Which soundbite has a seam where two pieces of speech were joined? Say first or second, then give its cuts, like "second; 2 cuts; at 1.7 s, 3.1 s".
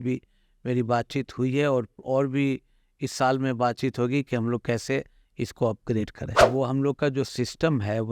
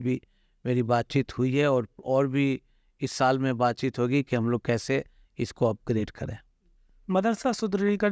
first; 1 cut; at 6.4 s